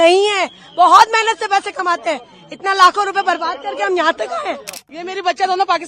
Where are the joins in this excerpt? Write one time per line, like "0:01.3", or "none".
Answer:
0:04.9